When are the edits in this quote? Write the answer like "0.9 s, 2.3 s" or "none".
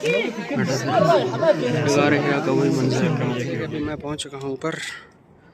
3.6 s

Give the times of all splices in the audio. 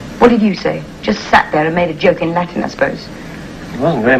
none

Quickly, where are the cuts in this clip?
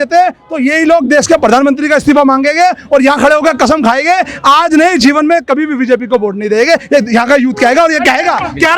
none

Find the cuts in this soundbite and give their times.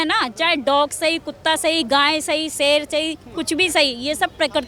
none

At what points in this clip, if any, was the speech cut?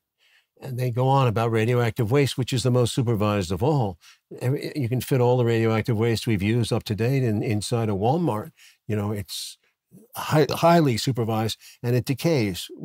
none

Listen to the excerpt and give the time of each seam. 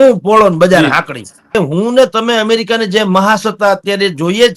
1.6 s

